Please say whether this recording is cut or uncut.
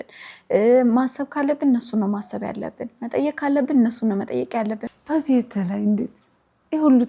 cut